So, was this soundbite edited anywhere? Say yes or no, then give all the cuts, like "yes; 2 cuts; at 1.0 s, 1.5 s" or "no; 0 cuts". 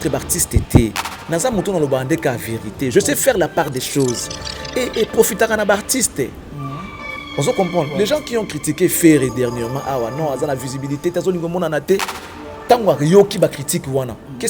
no; 0 cuts